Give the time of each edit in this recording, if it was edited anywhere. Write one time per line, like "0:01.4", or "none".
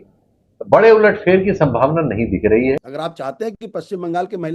0:02.9